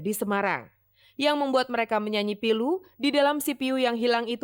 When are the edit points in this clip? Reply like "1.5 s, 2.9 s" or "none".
none